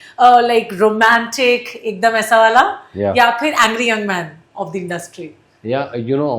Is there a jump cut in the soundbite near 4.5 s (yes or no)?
no